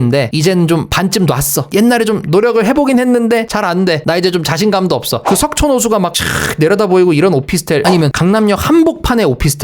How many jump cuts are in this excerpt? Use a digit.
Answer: 1